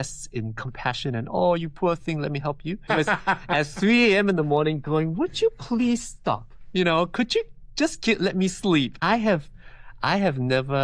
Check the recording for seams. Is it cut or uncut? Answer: cut